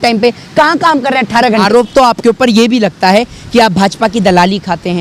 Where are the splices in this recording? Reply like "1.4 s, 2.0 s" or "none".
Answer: 1.7 s